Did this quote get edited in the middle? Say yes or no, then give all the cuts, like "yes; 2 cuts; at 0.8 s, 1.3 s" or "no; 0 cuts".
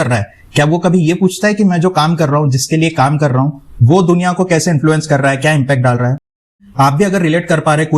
yes; 1 cut; at 6.5 s